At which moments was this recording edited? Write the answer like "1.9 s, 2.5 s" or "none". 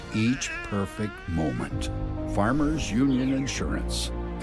none